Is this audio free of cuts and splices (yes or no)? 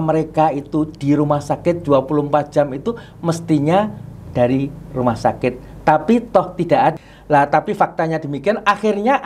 no